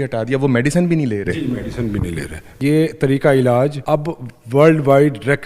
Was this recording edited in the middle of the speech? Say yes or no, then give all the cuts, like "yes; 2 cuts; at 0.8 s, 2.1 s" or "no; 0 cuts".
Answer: yes; 2 cuts; at 2.6 s, 3.8 s